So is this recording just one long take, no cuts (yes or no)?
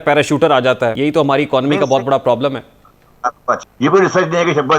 no